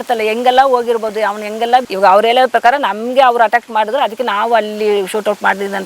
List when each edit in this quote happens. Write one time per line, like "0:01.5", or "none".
0:01.9

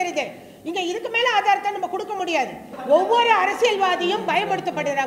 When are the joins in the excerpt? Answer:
0:02.7

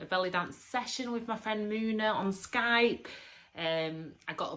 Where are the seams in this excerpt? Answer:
none

